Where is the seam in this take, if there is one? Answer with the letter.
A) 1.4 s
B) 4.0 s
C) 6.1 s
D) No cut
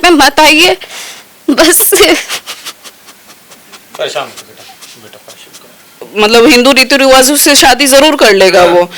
C